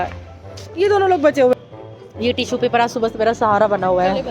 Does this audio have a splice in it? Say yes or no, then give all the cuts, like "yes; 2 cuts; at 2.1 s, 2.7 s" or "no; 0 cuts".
yes; 1 cut; at 1.5 s